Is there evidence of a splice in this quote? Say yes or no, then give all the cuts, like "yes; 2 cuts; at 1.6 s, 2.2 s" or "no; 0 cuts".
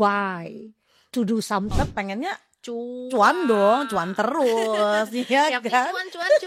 yes; 1 cut; at 1.7 s